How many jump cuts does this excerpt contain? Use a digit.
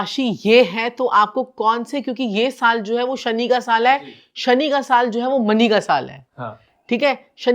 0